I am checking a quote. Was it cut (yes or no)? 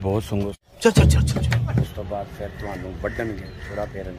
yes